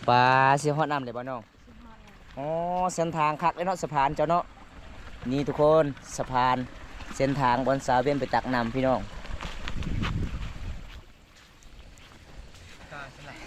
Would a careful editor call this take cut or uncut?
uncut